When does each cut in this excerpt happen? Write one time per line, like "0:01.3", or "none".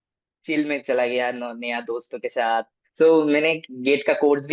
0:02.8